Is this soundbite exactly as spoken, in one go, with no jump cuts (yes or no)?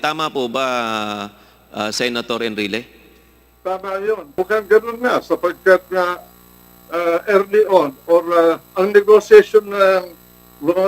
no